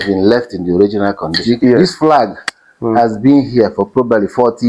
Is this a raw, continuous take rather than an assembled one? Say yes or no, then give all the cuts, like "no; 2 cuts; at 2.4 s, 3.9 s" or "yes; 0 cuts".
no; 1 cut; at 1.8 s